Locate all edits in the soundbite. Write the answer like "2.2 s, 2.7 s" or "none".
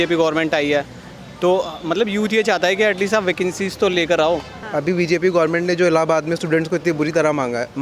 4.6 s

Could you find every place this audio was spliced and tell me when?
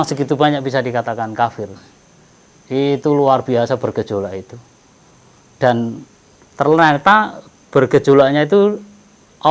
none

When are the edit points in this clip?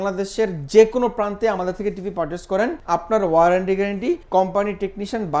2.8 s, 4.2 s

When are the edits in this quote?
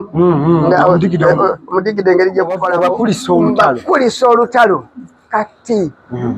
2.6 s

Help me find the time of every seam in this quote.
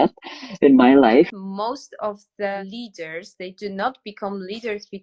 1.4 s, 2.6 s

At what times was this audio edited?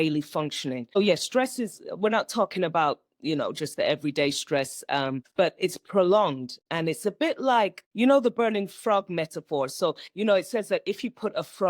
1.0 s, 5.2 s, 7.8 s

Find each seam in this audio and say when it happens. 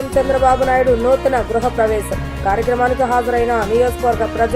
none

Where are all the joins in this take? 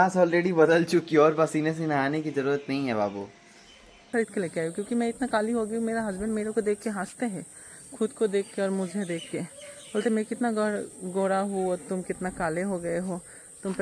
4.1 s

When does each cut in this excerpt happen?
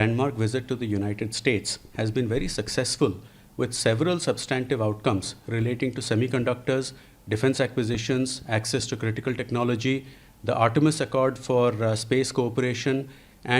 none

